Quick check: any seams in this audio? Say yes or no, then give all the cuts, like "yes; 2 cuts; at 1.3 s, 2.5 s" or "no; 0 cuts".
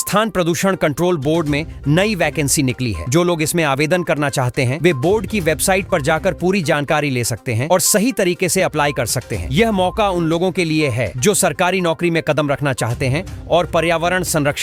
no; 0 cuts